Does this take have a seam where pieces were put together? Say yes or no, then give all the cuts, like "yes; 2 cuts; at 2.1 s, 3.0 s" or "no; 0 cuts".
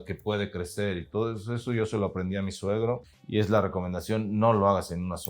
yes; 1 cut; at 3.1 s